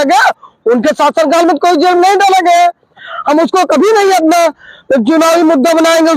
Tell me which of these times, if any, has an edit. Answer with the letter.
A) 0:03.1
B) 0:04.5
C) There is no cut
A